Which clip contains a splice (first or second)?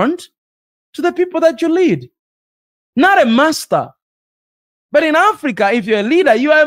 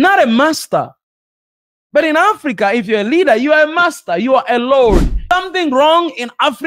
second